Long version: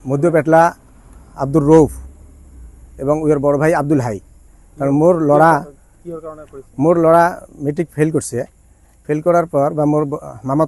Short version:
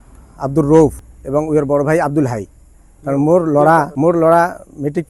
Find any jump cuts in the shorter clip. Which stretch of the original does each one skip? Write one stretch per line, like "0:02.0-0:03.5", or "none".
0:02.1-0:02.8
0:05.6-0:06.7